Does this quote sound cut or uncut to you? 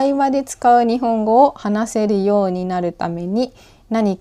uncut